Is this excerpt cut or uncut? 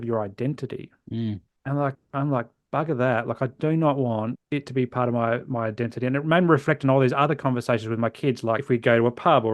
cut